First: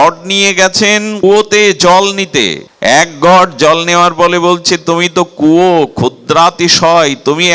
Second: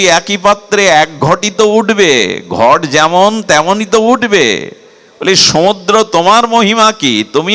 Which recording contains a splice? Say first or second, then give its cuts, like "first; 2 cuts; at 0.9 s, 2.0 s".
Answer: first; 2 cuts; at 1.1 s, 2.6 s